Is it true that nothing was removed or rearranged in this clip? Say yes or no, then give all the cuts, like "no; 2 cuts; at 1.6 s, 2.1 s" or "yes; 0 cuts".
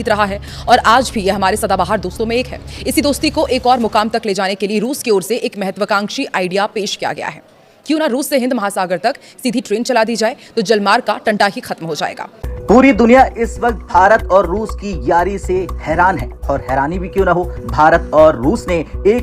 no; 1 cut; at 12.3 s